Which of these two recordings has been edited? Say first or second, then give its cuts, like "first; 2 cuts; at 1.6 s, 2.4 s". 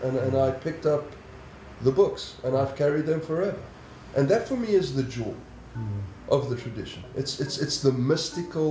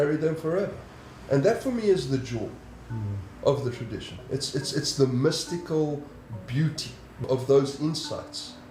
second; 1 cut; at 7.2 s